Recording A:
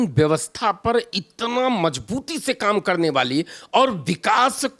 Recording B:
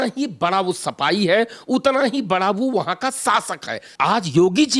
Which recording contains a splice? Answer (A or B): B